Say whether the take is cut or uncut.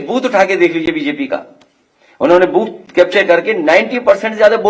uncut